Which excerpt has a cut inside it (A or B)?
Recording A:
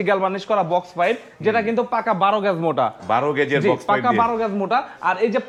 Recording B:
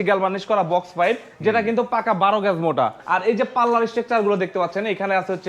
B